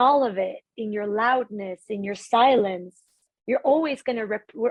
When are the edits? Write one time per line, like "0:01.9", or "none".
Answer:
none